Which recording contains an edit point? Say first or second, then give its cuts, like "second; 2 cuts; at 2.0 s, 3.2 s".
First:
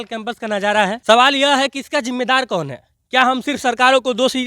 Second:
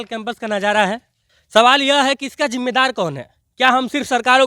first; 1 cut; at 1.0 s